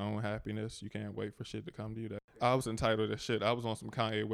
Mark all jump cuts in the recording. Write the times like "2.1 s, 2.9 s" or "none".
2.4 s